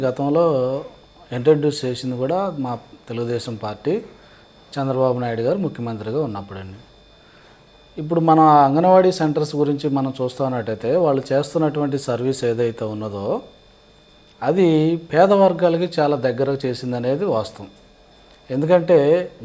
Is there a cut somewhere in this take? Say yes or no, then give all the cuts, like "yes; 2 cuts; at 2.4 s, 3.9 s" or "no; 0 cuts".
no; 0 cuts